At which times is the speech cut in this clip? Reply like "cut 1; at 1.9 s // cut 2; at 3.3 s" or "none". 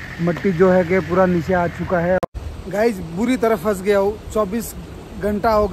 cut 1; at 2.2 s